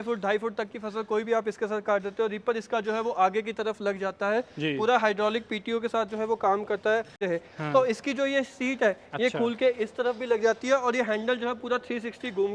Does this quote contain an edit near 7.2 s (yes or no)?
yes